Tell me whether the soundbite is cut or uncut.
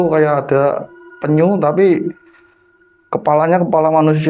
uncut